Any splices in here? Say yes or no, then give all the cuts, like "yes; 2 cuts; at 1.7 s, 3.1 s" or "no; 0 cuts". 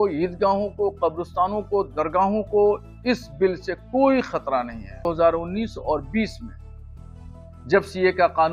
yes; 1 cut; at 5.0 s